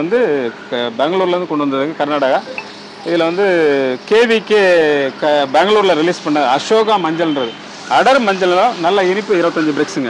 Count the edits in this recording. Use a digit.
0